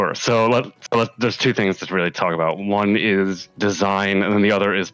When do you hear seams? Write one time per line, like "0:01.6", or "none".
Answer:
0:03.4